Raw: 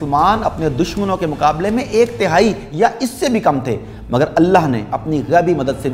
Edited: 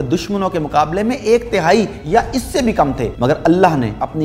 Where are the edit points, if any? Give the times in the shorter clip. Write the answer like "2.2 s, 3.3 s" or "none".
3.1 s